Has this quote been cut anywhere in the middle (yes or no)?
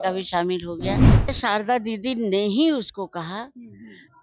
yes